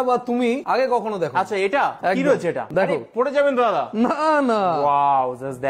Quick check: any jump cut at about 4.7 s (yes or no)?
no